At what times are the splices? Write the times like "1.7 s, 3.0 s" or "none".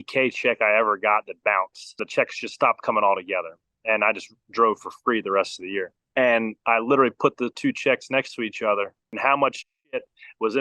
2.0 s, 6.0 s, 9.2 s